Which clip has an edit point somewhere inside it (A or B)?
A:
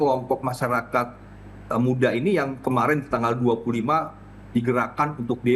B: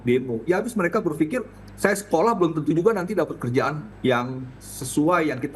B